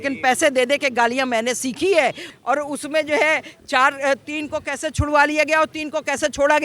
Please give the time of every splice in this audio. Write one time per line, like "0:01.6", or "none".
0:02.3

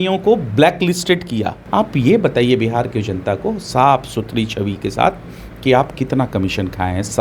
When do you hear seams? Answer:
0:01.6

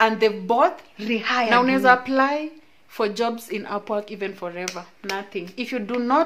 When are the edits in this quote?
0:01.5

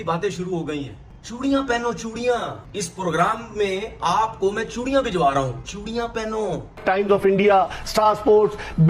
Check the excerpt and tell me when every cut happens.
0:06.8

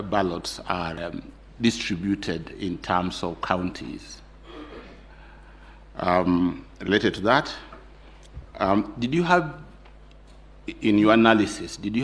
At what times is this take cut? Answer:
0:01.0

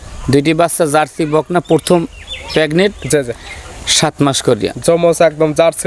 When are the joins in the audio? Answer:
none

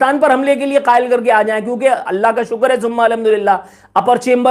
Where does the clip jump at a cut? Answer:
none

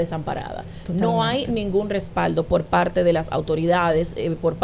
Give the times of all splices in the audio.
none

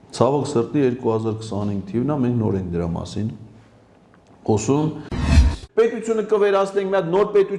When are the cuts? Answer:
0:05.3

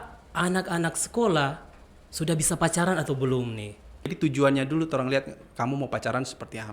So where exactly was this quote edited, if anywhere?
0:04.1

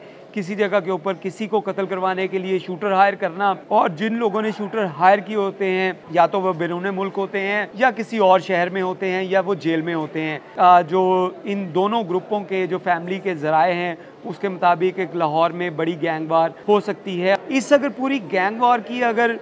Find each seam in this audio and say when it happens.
0:03.6
0:06.0
0:07.7
0:10.4
0:16.9

